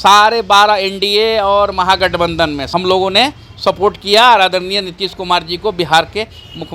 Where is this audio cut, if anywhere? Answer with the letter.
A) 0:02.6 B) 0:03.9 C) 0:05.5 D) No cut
A